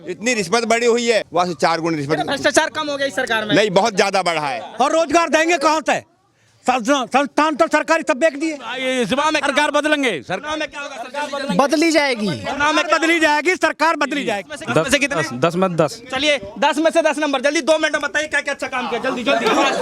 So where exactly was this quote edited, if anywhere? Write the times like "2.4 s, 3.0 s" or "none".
1.3 s, 4.6 s, 8.7 s, 14.5 s